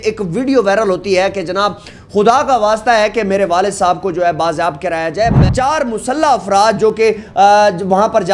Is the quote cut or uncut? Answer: cut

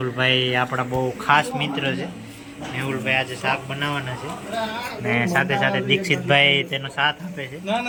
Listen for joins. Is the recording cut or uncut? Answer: uncut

